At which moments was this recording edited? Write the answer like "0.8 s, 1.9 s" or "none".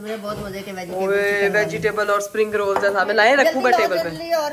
none